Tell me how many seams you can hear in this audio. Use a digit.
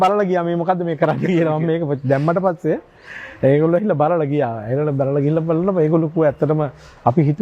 0